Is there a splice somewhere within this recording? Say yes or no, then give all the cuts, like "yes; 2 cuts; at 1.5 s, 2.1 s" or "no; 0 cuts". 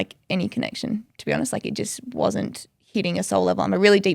no; 0 cuts